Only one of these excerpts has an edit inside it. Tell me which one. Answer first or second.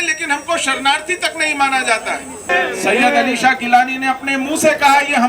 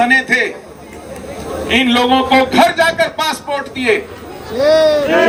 first